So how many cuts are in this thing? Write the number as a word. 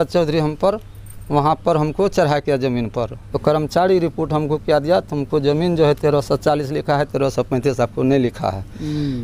one